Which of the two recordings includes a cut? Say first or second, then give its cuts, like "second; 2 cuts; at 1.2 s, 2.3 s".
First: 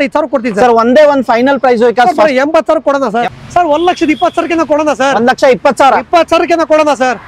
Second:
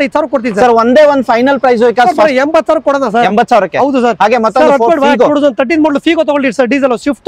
first; 1 cut; at 3.3 s